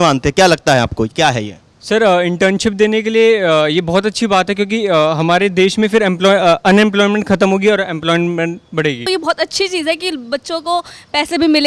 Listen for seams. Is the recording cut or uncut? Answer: cut